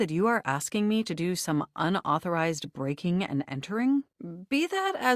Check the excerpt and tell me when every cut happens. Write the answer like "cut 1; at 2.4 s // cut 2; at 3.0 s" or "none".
none